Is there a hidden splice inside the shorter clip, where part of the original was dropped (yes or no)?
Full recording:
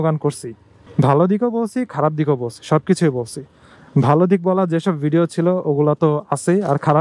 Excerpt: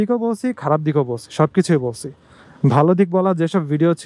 no